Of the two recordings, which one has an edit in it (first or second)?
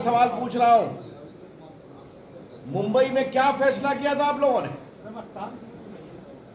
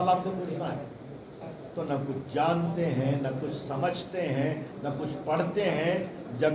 second